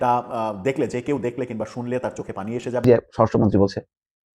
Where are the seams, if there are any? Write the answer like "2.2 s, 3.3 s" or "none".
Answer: 2.8 s